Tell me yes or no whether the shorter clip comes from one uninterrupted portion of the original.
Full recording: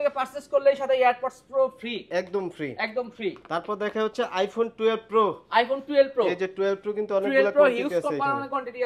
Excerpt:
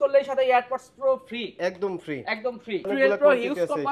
no